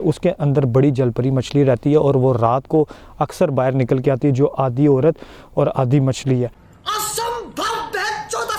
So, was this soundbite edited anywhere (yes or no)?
yes